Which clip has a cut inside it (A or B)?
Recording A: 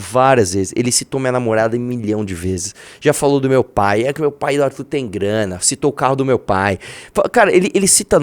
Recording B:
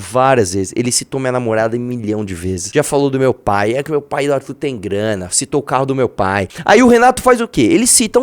B